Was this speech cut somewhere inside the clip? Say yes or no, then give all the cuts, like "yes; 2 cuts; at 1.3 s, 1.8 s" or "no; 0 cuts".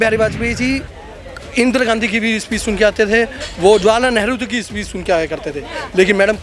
no; 0 cuts